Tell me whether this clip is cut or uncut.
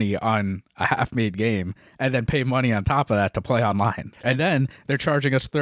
cut